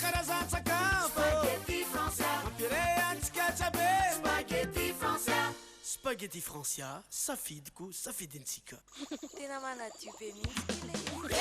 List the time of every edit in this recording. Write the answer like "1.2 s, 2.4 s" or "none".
8.7 s